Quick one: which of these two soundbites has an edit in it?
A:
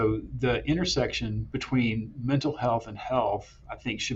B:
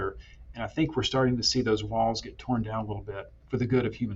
A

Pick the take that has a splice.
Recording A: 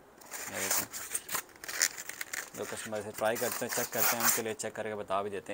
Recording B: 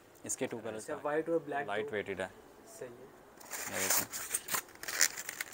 B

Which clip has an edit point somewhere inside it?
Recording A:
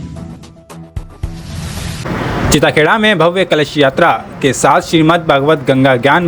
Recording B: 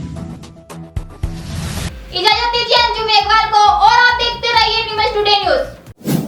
A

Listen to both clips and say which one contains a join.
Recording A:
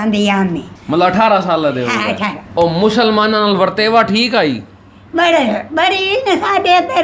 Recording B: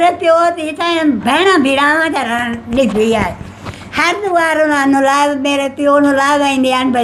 A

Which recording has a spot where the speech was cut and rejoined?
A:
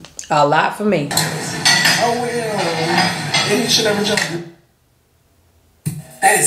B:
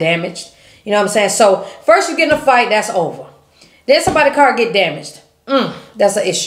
A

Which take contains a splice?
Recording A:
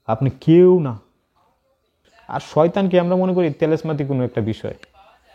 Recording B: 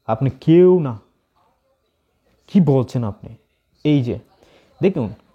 A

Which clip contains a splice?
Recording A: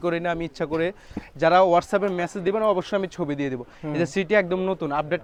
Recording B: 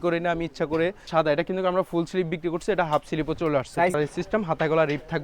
B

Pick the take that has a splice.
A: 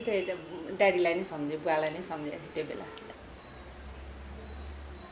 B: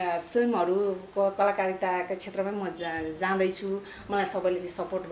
A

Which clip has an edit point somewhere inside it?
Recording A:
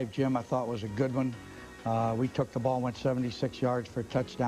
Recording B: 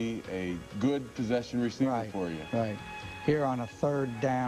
A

